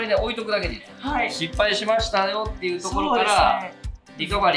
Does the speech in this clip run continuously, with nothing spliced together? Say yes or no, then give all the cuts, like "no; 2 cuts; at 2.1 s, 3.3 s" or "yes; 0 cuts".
no; 1 cut; at 0.9 s